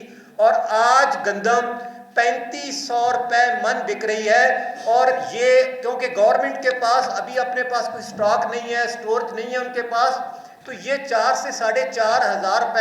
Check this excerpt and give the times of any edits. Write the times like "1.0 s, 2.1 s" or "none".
none